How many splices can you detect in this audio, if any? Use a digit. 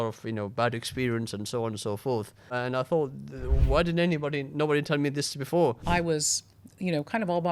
2